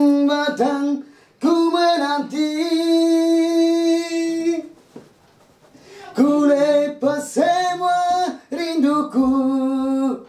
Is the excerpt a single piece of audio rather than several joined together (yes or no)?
yes